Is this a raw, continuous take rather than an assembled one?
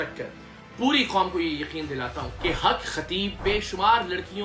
no; 2 cuts; at 2.2 s, 3.4 s

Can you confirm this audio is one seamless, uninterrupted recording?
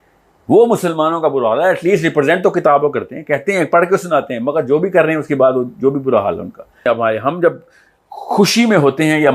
no; 1 cut; at 6.8 s

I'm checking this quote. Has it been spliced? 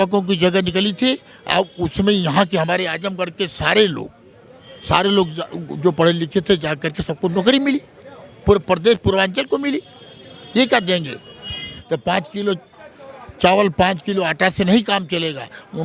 yes; 1 cut; at 11.7 s

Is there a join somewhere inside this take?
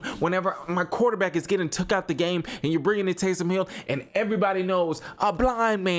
no; 0 cuts

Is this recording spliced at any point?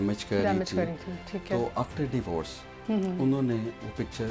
no; 0 cuts

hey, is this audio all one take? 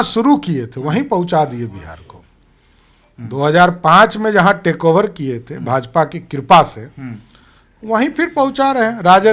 yes; 0 cuts

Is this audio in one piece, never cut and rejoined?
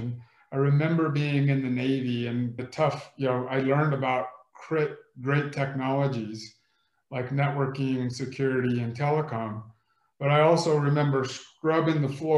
no; 1 cut; at 2.6 s

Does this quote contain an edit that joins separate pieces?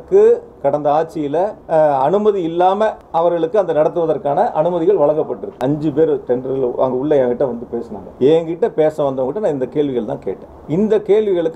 yes; 5 cuts; at 1.6 s, 3.0 s, 5.5 s, 8.0 s, 10.5 s

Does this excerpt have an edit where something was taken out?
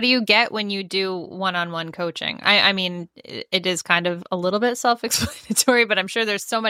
no; 0 cuts

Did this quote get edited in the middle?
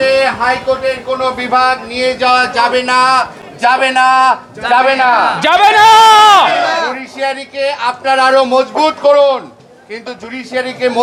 no; 0 cuts

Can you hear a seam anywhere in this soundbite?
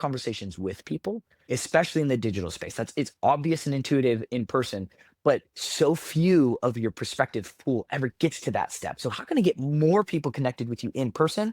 yes; 1 cut; at 1.3 s

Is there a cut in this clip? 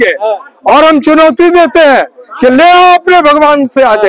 no; 0 cuts

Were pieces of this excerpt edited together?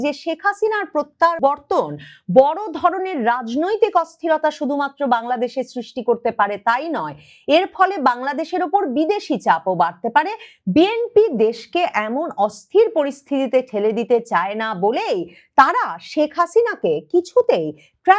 no; 0 cuts

